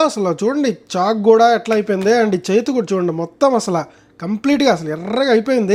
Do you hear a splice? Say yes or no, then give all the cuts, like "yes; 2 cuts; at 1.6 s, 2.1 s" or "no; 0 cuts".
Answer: no; 0 cuts